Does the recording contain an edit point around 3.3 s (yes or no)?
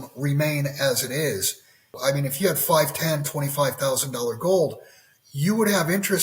no